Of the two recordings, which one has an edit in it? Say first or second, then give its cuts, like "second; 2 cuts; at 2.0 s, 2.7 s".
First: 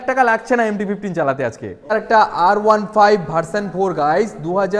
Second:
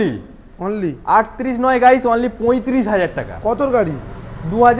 first; 1 cut; at 1.9 s